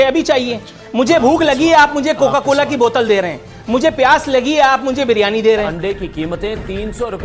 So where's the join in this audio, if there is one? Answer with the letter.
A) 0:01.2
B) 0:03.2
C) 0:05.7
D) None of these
C